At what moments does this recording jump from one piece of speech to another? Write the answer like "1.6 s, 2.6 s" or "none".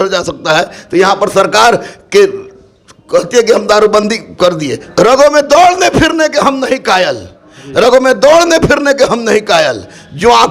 4.8 s

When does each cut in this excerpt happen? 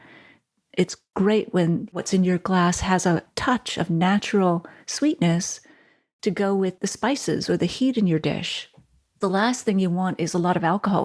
1.0 s, 1.9 s, 9.2 s

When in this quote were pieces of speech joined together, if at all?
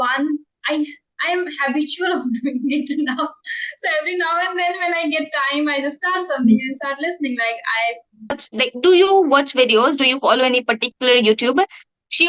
8.4 s

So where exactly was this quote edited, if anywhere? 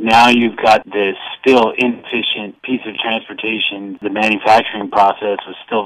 0.9 s, 2.5 s, 3.9 s

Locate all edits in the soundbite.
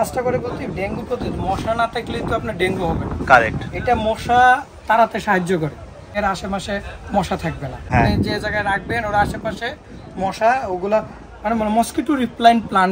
6.1 s, 7.9 s

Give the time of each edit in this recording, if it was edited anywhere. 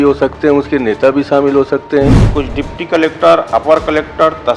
2.2 s

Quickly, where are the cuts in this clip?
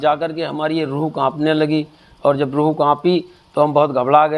none

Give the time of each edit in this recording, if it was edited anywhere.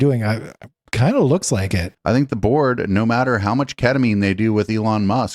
1.9 s

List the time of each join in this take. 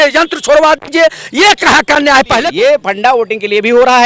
2.5 s

